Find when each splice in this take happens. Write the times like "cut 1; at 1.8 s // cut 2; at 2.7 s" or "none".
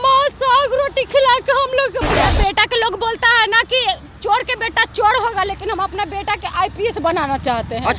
cut 1; at 2.2 s